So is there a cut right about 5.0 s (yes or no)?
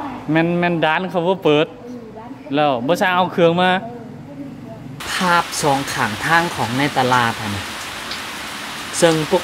yes